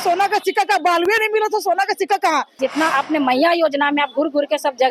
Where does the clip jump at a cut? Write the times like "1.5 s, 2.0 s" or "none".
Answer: 2.5 s